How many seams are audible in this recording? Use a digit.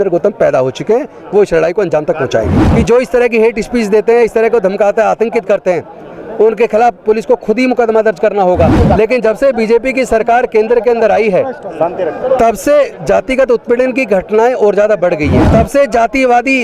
3